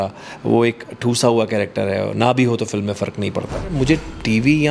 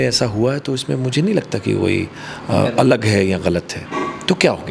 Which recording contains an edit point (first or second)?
first